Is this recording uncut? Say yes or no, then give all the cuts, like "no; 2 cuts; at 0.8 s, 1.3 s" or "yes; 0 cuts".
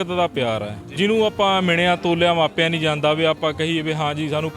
no; 1 cut; at 0.9 s